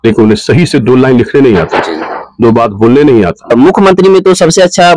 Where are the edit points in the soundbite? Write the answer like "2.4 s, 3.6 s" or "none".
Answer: 3.5 s